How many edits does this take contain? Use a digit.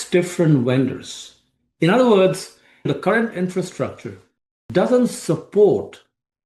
1